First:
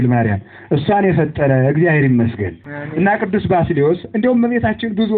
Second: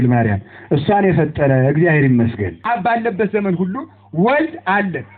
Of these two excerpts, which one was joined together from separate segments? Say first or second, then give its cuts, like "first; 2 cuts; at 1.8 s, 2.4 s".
second; 1 cut; at 2.5 s